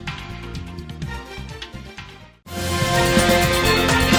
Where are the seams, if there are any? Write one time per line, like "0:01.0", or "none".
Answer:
none